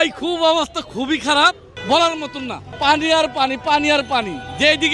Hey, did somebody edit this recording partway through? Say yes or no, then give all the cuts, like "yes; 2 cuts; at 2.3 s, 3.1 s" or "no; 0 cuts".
yes; 1 cut; at 1.7 s